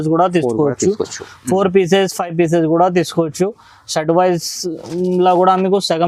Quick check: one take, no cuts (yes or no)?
yes